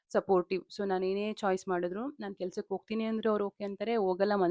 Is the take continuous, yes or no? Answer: yes